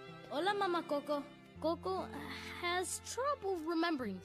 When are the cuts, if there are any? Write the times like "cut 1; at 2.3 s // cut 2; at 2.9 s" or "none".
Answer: cut 1; at 1.4 s